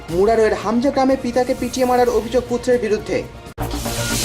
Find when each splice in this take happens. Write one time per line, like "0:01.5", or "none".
0:03.3